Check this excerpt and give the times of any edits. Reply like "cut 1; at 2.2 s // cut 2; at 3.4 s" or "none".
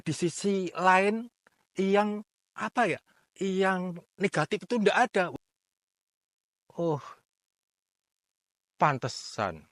cut 1; at 5.3 s